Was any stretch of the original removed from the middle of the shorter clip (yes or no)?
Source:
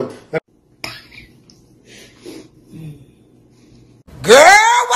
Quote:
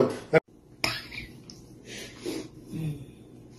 no